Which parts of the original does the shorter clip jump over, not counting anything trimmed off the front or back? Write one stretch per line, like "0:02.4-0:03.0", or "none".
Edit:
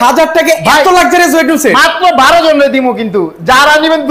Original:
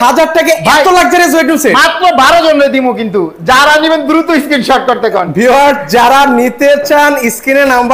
none